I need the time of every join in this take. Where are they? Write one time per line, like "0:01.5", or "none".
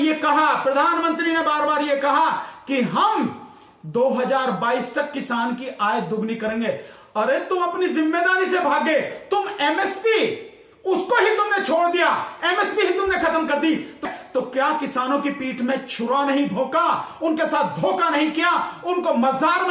none